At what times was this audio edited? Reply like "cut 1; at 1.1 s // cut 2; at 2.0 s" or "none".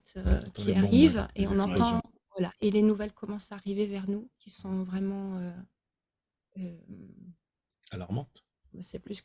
cut 1; at 2.6 s